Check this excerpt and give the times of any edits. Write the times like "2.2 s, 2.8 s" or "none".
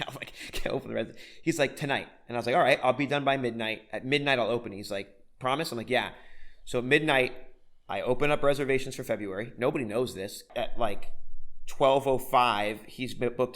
10.5 s

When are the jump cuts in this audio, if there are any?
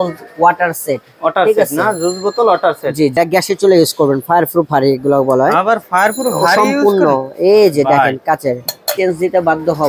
3.1 s, 8.9 s

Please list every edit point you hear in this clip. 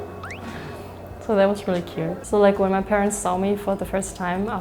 2.2 s

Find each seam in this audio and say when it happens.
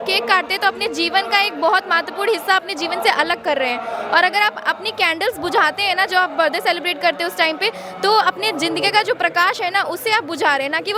none

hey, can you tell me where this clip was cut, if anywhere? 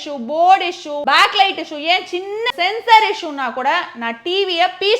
0.9 s, 2.5 s

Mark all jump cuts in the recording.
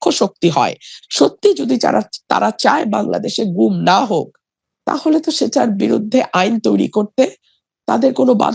none

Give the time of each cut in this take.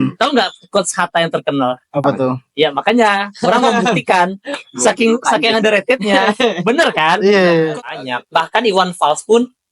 7.8 s

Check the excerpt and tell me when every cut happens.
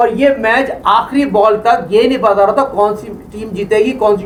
none

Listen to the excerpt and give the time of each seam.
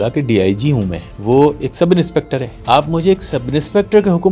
1.1 s, 2.5 s

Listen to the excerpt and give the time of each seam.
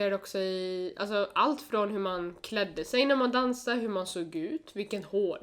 none

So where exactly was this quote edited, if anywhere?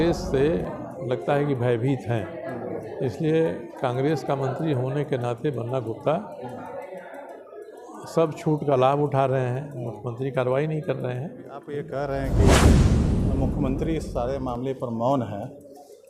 11.5 s

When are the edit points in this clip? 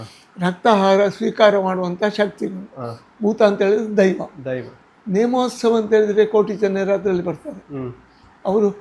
none

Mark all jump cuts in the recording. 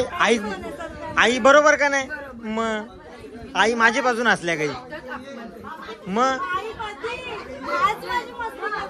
none

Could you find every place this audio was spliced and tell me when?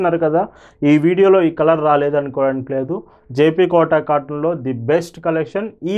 none

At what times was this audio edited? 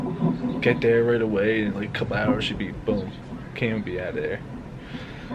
none

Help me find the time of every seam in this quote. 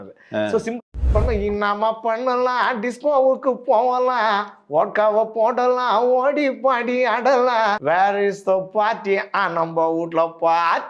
0.9 s

